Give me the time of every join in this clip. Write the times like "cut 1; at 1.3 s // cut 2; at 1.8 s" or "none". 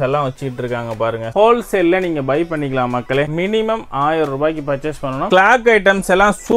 cut 1; at 1.3 s // cut 2; at 3.3 s // cut 3; at 5.2 s